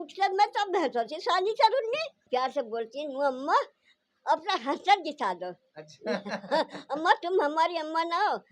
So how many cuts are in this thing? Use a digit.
1